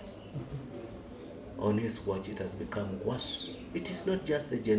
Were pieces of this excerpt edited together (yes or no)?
no